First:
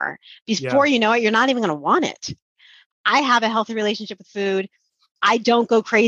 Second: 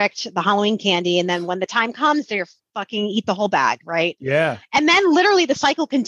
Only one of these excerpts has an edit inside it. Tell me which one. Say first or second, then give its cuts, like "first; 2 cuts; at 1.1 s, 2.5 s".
first; 1 cut; at 2.7 s